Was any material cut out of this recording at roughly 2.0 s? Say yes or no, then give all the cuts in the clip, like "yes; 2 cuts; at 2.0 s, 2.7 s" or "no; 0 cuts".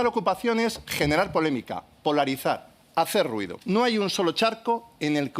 no; 1 cut; at 3.5 s